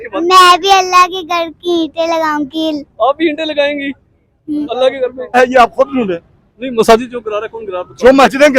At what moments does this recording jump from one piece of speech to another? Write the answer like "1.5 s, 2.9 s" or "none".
5.4 s